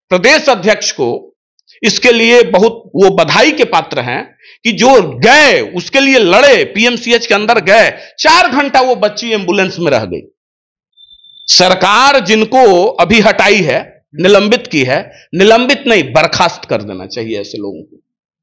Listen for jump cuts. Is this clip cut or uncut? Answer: uncut